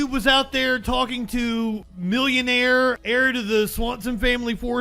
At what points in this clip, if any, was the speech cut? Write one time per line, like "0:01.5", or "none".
0:01.8
0:03.0